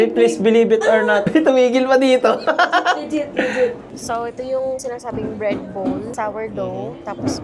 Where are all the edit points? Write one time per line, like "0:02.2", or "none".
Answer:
0:01.2
0:03.9